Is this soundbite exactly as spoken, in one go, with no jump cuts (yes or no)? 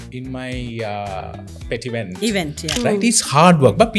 no